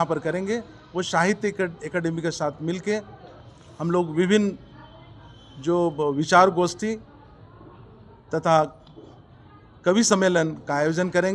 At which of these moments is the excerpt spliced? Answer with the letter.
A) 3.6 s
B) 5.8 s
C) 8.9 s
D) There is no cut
D